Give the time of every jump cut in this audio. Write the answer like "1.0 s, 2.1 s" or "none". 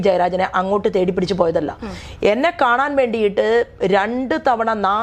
none